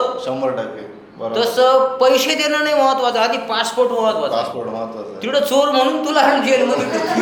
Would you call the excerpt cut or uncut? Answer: uncut